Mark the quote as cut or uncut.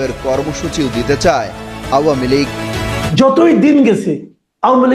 cut